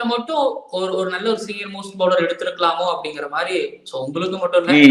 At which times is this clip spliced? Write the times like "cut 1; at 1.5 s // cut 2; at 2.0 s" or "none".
none